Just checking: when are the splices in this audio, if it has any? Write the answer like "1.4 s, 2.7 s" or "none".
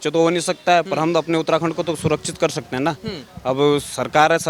none

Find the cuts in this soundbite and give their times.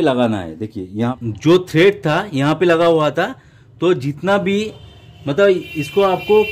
1.2 s

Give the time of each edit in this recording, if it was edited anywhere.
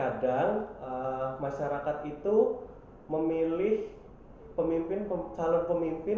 none

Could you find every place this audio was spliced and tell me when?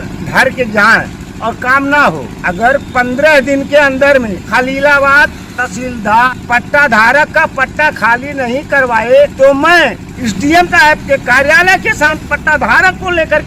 1.2 s, 2.3 s, 4.4 s, 6.3 s, 9.3 s, 10.1 s, 12.1 s

